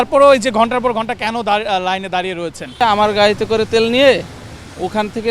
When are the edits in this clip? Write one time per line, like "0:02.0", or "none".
0:02.8